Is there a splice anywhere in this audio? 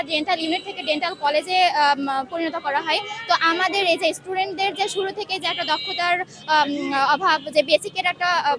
no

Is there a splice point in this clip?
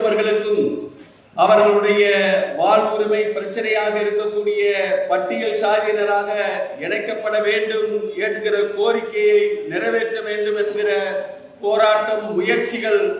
no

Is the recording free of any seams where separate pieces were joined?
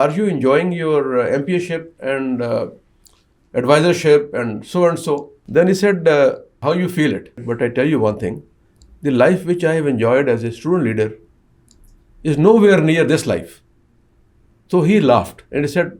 no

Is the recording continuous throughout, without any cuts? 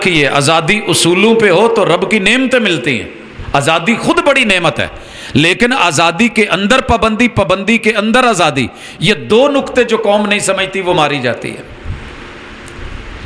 yes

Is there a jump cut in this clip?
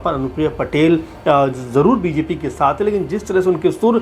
no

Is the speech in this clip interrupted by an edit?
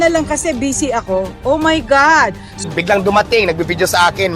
yes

